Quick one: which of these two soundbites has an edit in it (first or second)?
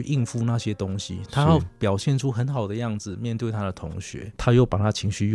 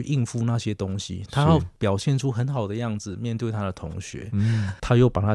first